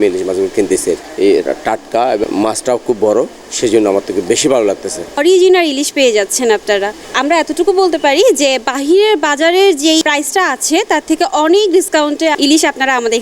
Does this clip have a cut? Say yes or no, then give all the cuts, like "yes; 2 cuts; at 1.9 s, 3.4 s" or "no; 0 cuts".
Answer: yes; 5 cuts; at 1.1 s, 2.2 s, 5.2 s, 10.0 s, 12.3 s